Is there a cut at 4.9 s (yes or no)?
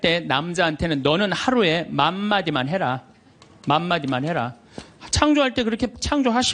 no